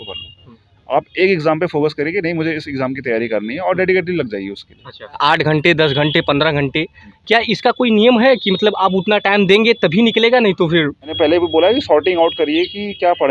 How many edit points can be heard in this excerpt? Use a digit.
2